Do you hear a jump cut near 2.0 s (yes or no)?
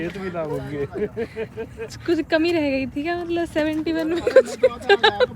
yes